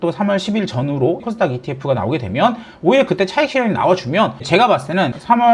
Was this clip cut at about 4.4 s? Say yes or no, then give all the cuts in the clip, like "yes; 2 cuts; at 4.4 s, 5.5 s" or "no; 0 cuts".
yes; 2 cuts; at 1.2 s, 4.4 s